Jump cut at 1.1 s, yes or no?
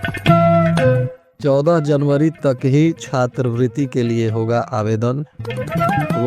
yes